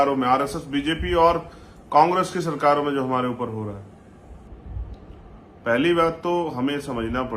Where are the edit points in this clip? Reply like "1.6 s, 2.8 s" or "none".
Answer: 4.5 s